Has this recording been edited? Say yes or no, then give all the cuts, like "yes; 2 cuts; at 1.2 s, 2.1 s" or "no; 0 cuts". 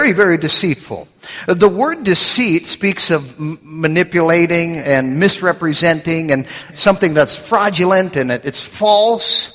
yes; 1 cut; at 6.7 s